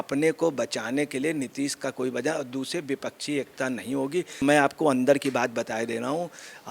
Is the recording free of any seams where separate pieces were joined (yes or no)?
no